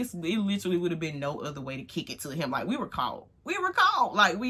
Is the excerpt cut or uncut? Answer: uncut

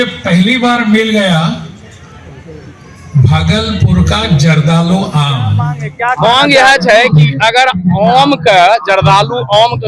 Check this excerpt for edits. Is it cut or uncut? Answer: cut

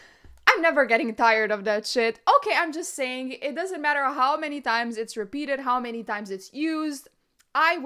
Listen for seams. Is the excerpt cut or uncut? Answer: uncut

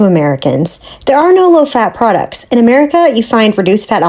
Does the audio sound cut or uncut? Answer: uncut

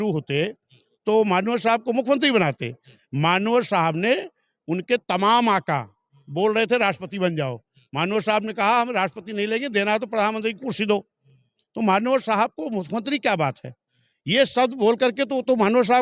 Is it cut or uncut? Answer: uncut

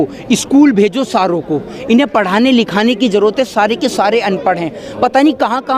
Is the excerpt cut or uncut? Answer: uncut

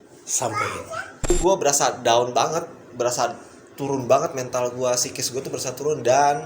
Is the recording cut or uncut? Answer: cut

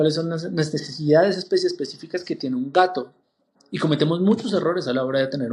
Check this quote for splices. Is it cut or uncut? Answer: uncut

